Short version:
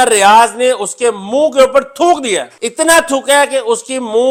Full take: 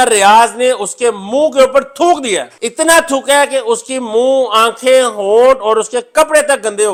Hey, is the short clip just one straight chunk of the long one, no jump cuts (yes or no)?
yes